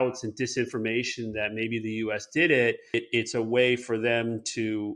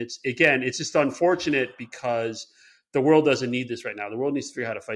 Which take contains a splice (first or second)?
first